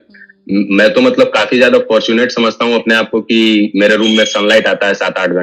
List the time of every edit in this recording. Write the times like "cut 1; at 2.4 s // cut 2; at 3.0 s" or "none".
none